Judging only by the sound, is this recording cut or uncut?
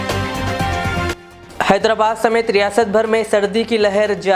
cut